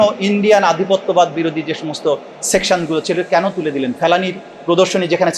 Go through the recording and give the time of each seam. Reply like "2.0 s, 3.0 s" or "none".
none